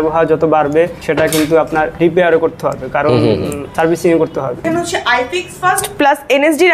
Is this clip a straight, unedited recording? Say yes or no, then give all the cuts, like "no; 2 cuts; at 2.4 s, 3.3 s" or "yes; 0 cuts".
no; 4 cuts; at 1.0 s, 1.9 s, 3.6 s, 4.6 s